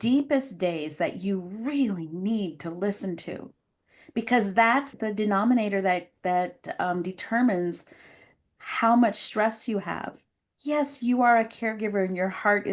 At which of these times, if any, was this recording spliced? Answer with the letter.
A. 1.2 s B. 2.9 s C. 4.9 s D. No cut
C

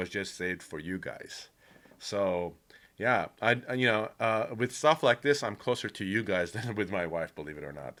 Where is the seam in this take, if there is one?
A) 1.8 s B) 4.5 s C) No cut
C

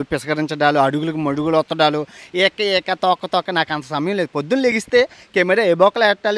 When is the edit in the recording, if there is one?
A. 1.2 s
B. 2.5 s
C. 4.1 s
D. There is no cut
D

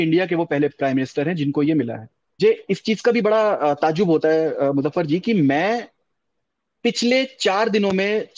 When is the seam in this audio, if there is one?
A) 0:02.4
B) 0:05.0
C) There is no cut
A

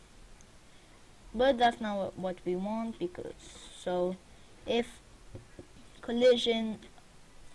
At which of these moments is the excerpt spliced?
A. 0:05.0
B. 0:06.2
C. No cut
C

